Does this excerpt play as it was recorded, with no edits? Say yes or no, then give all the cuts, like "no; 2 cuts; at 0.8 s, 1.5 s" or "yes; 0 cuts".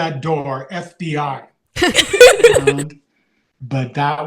no; 1 cut; at 2.8 s